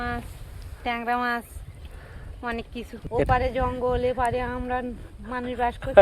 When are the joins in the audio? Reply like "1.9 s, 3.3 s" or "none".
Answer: 3.0 s

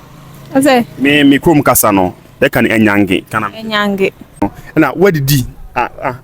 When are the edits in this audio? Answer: 4.5 s

